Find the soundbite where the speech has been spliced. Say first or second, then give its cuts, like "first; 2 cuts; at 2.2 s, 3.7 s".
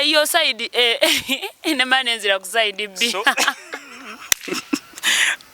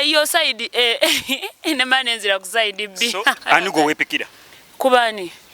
second; 1 cut; at 3.4 s